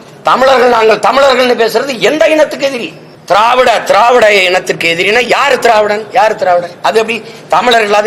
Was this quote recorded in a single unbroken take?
yes; 0 cuts

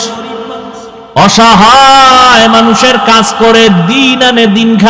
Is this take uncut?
no; 1 cut; at 1.2 s

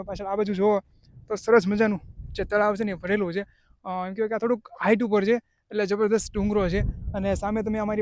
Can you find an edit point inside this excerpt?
no; 0 cuts

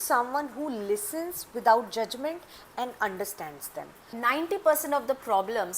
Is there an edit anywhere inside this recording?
yes; 1 cut; at 4.1 s

